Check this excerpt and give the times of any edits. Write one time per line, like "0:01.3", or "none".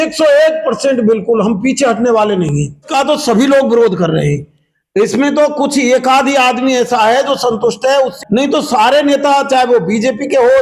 0:02.9
0:08.1